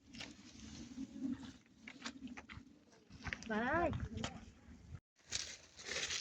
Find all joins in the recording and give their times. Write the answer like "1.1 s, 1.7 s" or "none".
5.2 s